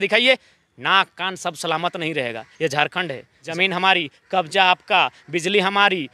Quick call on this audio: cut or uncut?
cut